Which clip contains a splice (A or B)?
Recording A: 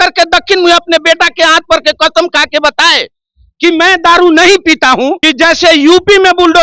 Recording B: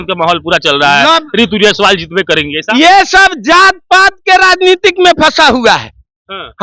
A